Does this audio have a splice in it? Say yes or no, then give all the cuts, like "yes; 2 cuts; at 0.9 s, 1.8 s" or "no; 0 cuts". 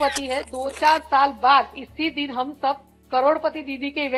no; 0 cuts